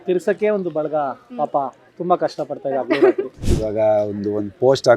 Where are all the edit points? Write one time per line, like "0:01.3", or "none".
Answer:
0:03.4

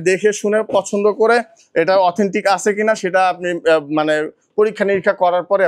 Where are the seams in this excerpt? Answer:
none

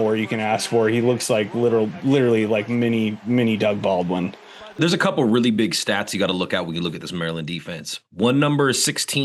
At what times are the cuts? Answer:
0:04.8

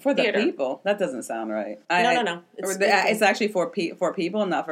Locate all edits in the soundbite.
0:01.8

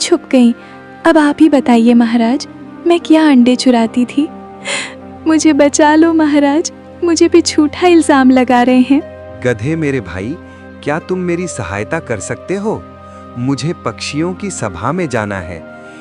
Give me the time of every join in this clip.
0:09.2

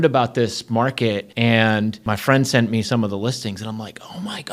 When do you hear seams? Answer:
0:01.3
0:02.0

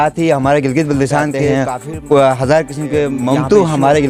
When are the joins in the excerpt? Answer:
0:01.4
0:03.2

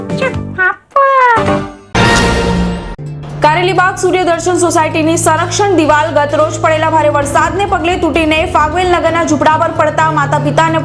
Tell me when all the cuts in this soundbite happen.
0:01.7

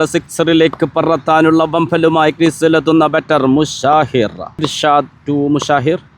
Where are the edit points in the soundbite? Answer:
0:04.7

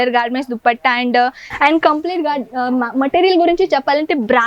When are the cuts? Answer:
0:01.5

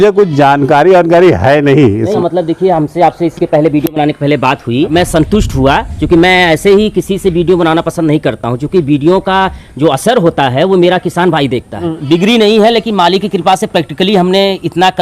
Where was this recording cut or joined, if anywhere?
0:02.1
0:04.9
0:11.9

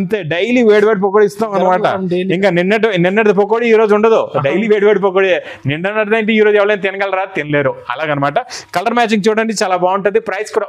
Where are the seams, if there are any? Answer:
none

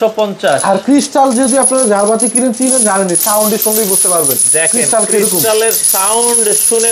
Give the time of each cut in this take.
none

